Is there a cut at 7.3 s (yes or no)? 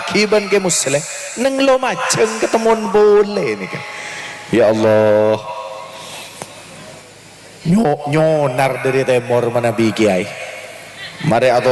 no